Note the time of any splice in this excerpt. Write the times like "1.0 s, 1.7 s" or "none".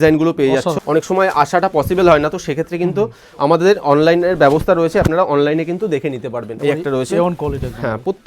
0.8 s, 6.5 s